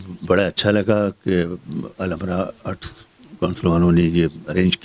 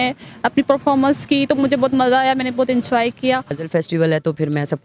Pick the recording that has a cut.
second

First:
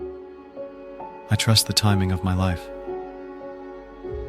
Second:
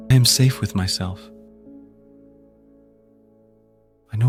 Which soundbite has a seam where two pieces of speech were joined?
first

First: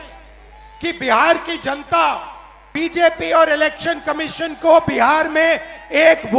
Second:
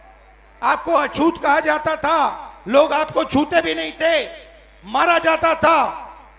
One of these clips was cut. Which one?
first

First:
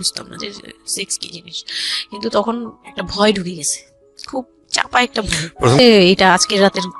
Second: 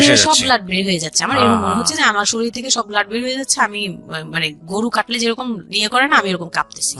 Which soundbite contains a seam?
first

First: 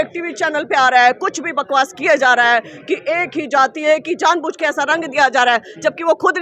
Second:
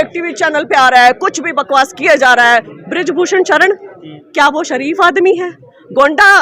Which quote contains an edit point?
second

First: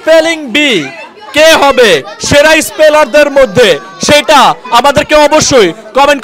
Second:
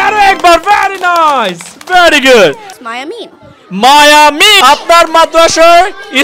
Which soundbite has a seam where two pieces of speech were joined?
second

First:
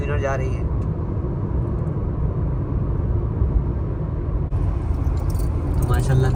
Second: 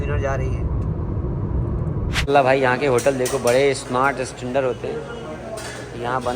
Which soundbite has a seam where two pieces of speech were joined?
second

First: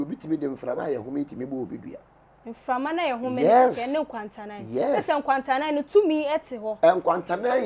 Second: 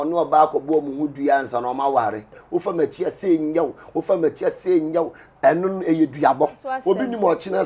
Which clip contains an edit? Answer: second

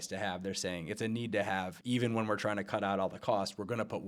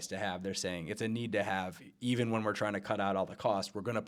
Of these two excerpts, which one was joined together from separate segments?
first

